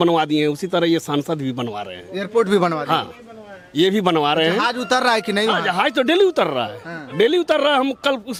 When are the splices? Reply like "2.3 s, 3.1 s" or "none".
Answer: none